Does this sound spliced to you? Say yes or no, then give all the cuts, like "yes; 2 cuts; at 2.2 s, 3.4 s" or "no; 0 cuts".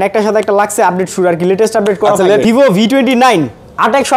yes; 1 cut; at 2.4 s